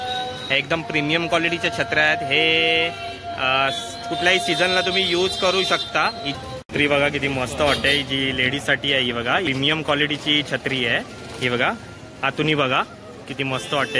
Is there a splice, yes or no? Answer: yes